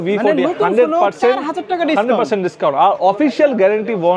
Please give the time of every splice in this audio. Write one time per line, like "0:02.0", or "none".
none

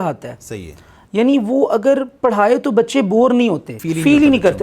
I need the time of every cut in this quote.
0:03.7

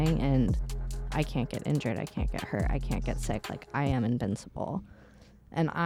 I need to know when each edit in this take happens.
none

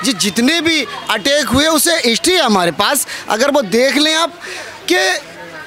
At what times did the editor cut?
none

